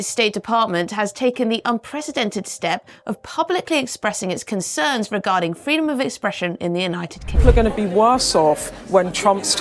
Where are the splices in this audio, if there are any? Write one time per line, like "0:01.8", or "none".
0:07.4